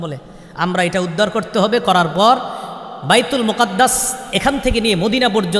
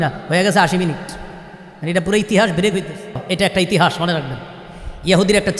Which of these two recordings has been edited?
second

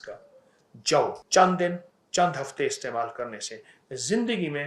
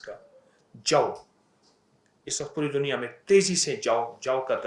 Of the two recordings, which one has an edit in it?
first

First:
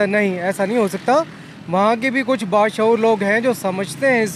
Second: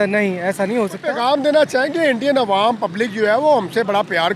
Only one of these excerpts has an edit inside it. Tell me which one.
second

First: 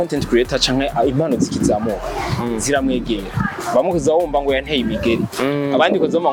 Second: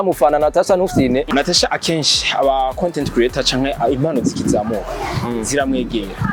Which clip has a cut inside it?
second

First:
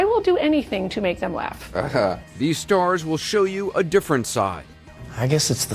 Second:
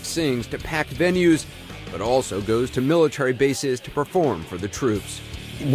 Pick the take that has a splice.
first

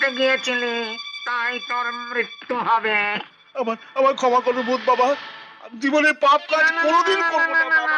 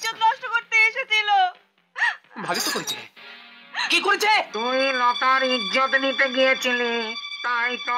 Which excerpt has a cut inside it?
second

